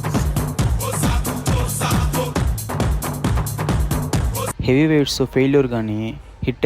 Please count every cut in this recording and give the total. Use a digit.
1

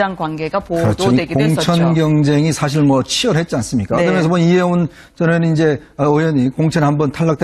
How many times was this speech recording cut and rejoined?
1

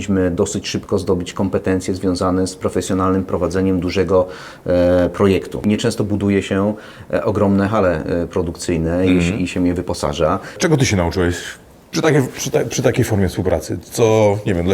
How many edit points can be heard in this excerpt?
2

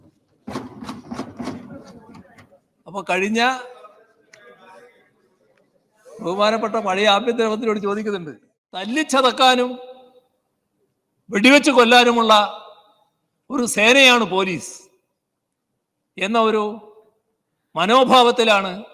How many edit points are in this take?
1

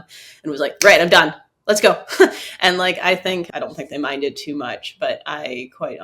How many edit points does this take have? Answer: 1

